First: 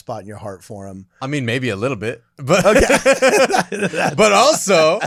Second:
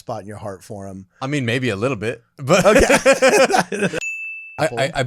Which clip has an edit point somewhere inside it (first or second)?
second